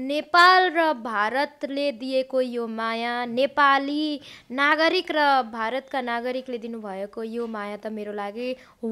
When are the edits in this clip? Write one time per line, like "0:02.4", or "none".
none